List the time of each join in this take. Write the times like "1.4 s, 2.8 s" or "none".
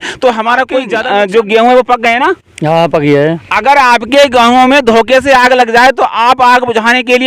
0.9 s